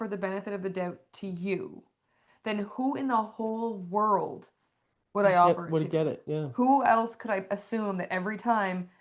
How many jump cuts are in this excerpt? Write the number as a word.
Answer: zero